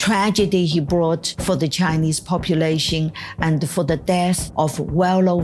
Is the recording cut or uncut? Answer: cut